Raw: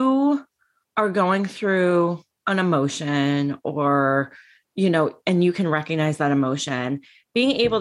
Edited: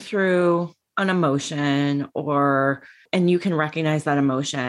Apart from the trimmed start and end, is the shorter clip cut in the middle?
yes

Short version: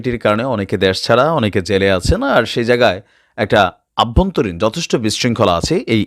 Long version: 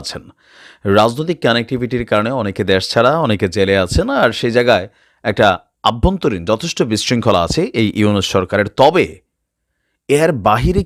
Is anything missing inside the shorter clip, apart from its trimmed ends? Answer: no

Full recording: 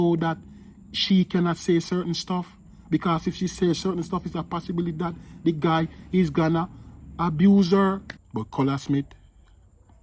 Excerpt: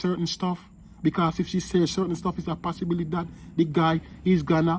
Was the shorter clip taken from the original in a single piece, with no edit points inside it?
yes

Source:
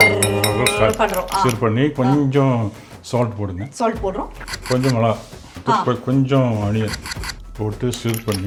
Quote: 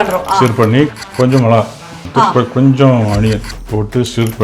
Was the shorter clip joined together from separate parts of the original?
yes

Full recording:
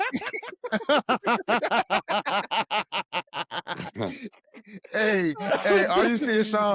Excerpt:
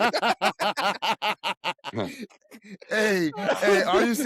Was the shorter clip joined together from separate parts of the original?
yes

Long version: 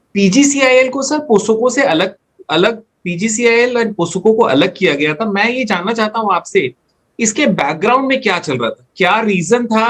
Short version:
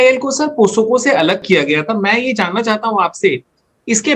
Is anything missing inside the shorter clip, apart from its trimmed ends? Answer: yes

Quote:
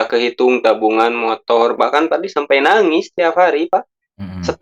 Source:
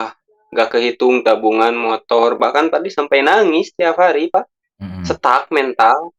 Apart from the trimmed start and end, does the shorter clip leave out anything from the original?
no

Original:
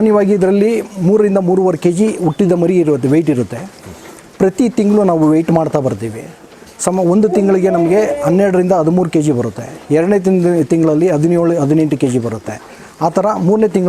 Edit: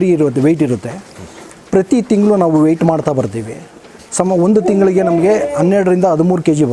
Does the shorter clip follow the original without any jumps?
yes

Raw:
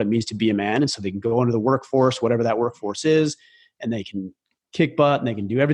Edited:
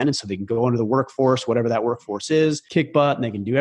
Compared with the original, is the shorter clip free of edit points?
no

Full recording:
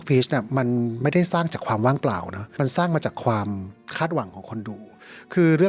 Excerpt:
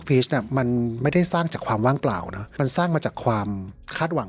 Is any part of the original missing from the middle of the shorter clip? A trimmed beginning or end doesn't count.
no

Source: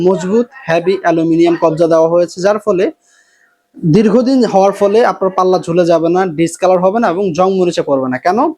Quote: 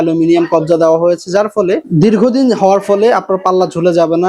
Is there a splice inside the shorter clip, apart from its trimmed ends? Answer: yes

